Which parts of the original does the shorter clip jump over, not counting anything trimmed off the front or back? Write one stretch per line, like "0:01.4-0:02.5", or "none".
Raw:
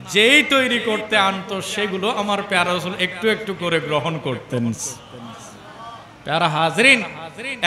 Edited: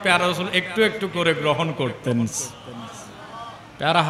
none